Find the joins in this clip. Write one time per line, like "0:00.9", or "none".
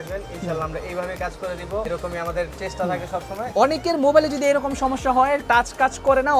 0:01.9
0:03.5

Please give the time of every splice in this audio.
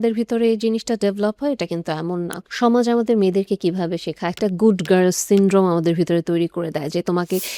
0:02.4

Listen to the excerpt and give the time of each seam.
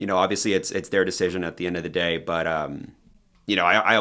none

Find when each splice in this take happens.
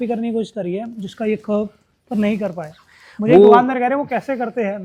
none

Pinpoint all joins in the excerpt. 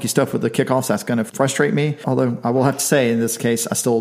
0:01.3
0:02.0

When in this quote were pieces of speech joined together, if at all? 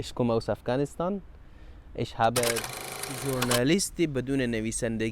0:02.9

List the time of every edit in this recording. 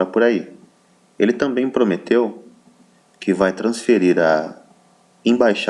none

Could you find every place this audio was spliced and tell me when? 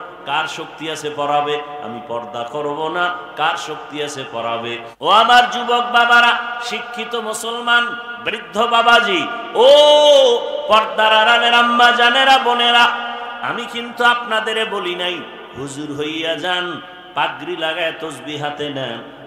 0:04.9

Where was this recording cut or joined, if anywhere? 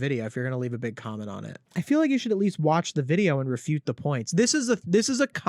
0:01.5

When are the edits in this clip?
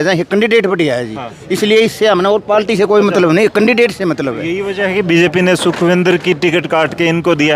none

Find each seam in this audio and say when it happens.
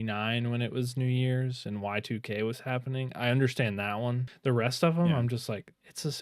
0:04.3

